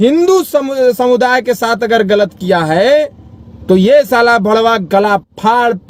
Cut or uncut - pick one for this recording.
uncut